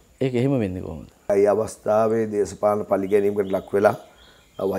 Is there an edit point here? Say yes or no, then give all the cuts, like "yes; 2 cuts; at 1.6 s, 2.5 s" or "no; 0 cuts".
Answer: yes; 1 cut; at 1.3 s